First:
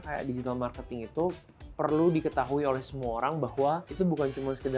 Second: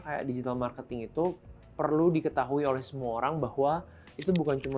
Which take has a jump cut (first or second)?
first